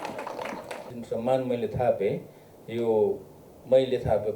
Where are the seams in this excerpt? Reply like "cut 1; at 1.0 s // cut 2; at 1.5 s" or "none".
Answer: cut 1; at 0.9 s